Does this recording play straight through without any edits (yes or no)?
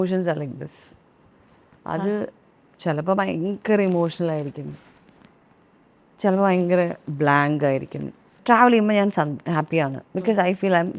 no